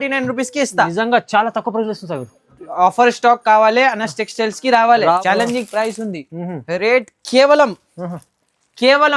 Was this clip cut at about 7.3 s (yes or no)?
no